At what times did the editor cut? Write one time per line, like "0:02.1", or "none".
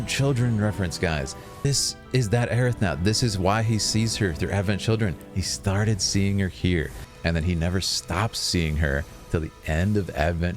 0:01.6
0:07.0